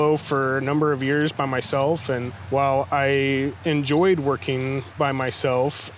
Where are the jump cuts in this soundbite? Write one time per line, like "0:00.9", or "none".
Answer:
0:02.3